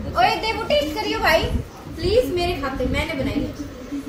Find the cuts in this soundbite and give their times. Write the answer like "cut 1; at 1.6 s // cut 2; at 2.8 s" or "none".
none